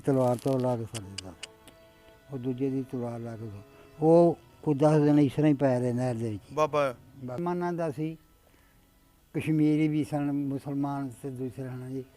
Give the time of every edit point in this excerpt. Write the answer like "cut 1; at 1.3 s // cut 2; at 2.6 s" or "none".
cut 1; at 7.4 s